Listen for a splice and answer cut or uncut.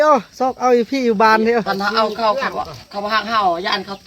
cut